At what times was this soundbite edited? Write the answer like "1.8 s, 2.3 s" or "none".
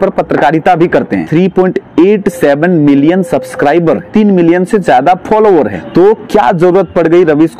1.2 s, 4.1 s, 5.8 s